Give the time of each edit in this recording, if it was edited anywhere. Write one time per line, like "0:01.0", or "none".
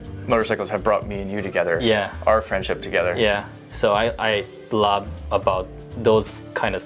0:03.6